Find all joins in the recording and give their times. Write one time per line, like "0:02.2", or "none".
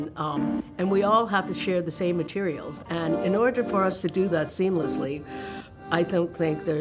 0:02.7